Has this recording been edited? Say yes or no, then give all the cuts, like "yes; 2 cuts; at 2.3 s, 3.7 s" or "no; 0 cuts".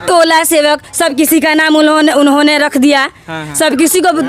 no; 0 cuts